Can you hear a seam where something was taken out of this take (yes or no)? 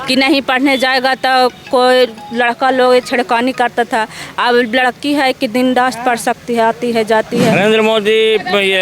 yes